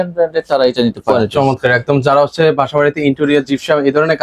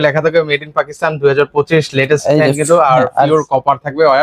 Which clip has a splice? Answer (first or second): first